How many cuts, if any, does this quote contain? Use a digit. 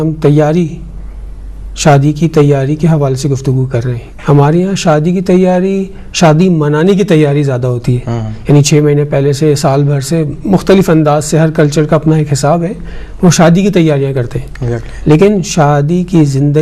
0